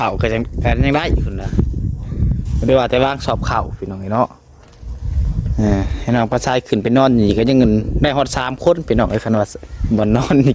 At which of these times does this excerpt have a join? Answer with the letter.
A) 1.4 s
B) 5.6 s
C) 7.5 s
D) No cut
D